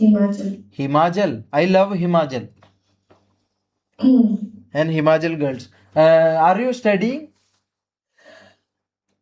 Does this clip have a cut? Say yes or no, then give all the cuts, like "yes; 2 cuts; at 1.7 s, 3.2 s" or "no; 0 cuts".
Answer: no; 0 cuts